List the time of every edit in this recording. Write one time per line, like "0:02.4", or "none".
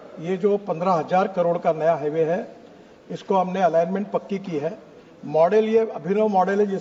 none